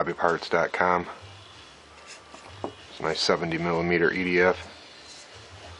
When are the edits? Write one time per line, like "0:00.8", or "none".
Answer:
none